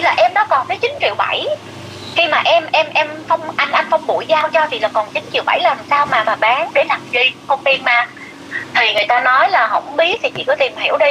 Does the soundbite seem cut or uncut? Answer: uncut